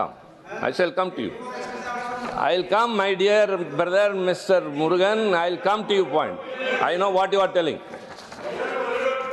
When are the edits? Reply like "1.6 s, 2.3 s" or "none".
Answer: none